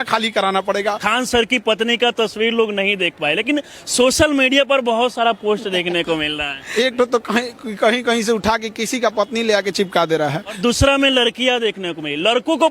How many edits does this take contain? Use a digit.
3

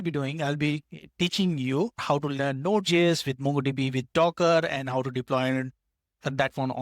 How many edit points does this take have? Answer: 1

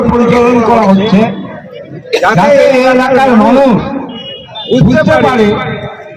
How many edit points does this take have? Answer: 0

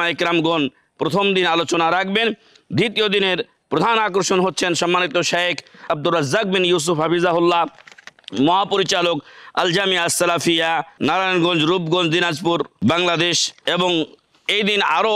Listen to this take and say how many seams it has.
4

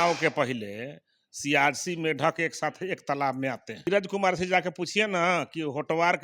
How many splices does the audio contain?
1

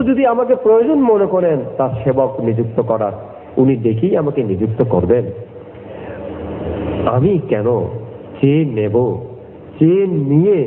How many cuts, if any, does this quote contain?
0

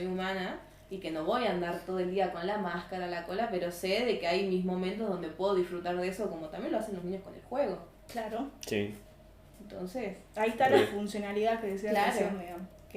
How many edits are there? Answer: 0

